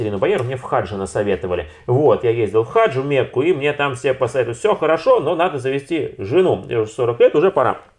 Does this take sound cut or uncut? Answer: uncut